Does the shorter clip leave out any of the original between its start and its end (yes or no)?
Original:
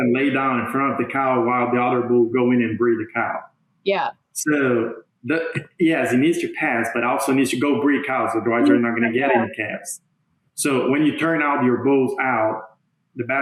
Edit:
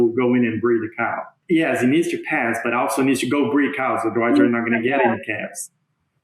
yes